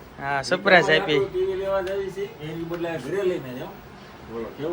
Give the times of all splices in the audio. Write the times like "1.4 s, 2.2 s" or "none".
none